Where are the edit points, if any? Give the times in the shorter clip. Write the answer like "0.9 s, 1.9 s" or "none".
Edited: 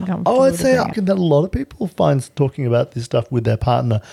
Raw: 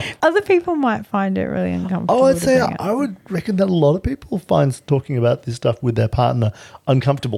0.9 s